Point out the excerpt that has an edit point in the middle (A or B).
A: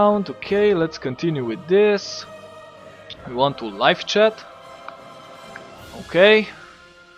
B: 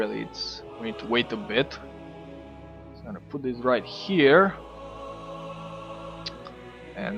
B